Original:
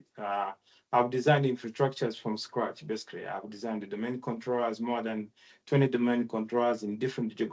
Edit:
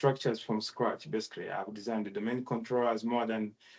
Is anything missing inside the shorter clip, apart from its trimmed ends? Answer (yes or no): no